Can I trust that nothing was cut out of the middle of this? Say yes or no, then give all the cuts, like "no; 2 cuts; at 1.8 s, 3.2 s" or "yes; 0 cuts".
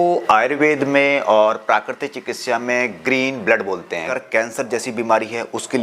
no; 1 cut; at 4.1 s